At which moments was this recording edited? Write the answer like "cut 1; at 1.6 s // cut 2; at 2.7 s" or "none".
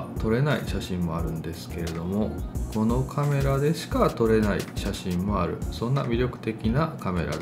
none